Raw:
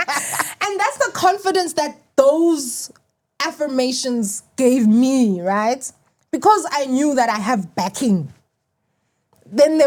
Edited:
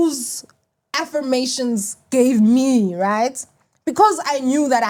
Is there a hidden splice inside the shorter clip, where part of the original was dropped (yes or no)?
no